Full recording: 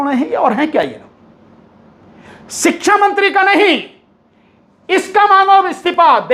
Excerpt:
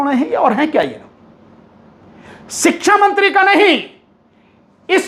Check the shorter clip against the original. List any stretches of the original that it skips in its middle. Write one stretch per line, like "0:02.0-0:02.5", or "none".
none